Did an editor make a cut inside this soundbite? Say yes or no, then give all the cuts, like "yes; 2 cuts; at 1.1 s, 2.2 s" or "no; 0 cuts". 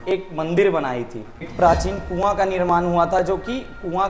yes; 1 cut; at 1.5 s